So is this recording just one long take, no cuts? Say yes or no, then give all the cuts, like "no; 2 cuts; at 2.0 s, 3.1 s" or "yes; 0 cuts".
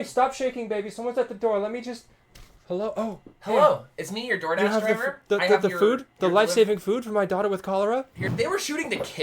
no; 1 cut; at 8.3 s